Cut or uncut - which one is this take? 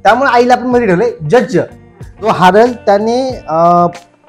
cut